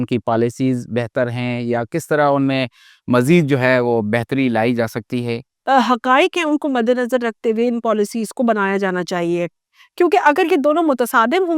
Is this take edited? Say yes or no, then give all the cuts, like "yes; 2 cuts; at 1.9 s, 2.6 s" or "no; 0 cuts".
yes; 1 cut; at 5.5 s